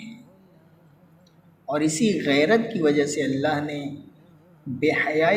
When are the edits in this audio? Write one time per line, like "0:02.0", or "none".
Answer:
none